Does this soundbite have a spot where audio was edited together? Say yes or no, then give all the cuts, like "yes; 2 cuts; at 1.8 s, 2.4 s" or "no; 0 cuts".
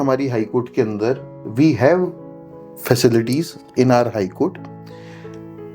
no; 0 cuts